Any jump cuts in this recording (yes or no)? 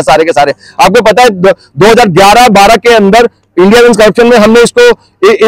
no